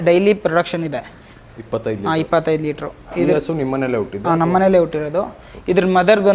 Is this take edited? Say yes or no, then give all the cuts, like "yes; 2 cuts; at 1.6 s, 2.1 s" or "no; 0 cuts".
no; 0 cuts